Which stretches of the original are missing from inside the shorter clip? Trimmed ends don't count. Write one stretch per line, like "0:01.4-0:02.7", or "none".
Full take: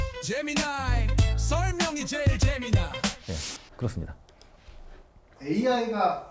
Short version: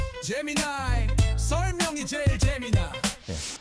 none